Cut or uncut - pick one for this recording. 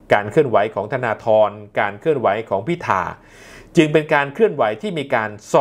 uncut